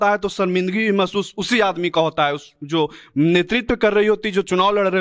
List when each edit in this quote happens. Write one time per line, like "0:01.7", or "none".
none

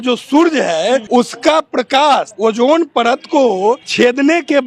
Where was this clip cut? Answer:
0:01.0
0:02.3
0:03.9

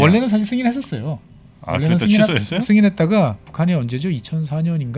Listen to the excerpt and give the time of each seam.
0:03.5

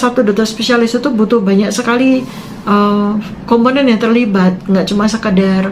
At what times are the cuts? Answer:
none

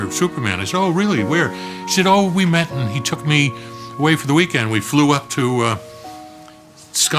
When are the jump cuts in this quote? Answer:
0:04.5

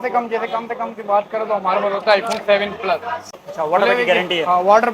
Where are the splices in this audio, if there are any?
0:03.2

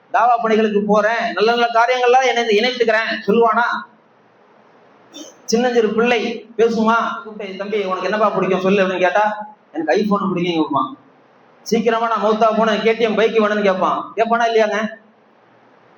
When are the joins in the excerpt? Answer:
0:07.6

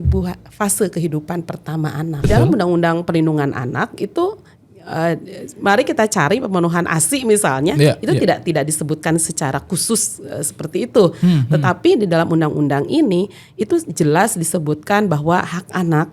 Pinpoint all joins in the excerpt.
0:02.2

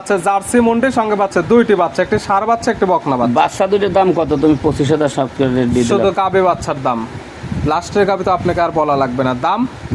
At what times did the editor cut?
none

